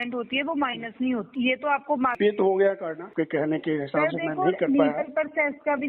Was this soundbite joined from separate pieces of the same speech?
yes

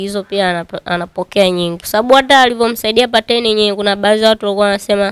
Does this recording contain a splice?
yes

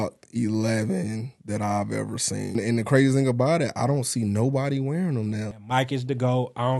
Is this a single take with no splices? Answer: no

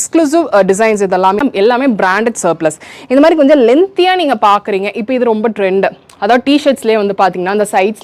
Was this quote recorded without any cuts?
no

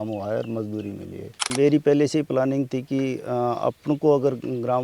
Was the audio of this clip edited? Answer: yes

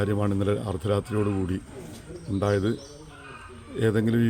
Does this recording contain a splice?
no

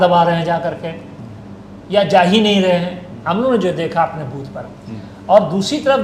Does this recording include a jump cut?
no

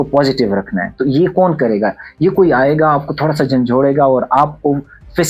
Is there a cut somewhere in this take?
no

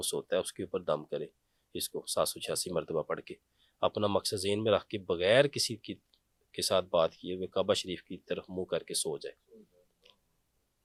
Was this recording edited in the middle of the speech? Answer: no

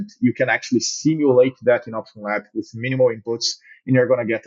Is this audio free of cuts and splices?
yes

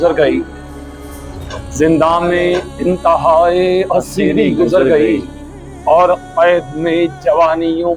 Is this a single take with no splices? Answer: yes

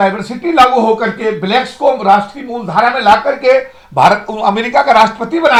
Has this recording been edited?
no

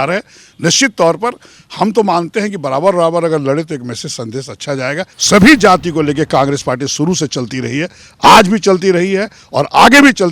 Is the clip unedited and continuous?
no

